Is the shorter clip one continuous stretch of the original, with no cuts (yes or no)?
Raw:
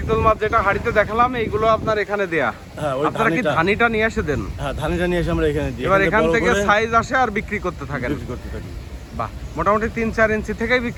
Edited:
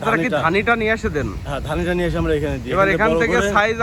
yes